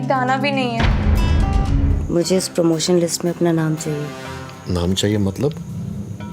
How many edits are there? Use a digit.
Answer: 1